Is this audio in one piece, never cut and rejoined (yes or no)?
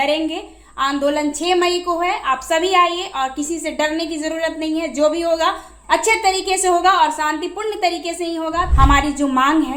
no